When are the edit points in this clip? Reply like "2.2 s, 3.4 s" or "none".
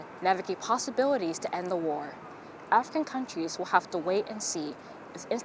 none